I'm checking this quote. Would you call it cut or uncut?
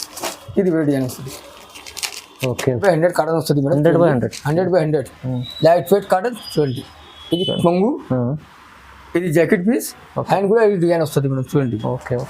cut